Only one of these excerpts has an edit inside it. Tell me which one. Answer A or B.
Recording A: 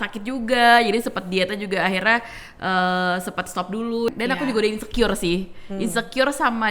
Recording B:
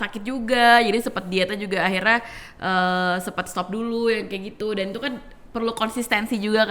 A